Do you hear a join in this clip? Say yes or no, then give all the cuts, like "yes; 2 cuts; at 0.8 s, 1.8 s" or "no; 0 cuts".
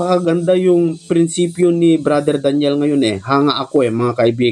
no; 0 cuts